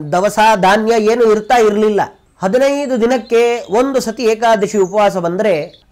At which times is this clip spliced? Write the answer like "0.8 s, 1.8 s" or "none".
2.2 s